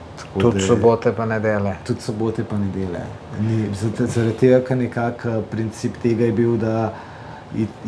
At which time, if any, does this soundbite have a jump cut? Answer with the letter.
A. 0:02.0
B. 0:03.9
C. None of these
C